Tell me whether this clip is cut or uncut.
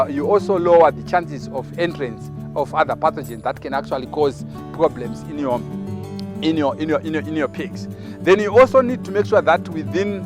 uncut